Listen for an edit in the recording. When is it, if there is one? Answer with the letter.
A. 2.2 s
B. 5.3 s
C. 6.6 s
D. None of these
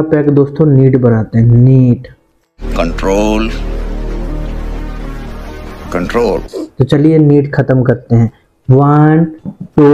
C